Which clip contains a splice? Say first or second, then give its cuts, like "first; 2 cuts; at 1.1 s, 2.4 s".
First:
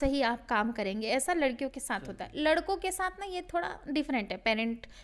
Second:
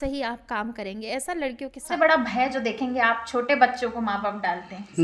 second; 1 cut; at 1.9 s